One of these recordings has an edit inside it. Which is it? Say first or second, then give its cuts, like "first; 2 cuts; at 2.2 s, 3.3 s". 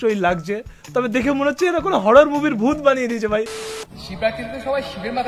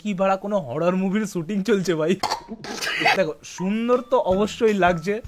first; 1 cut; at 3.4 s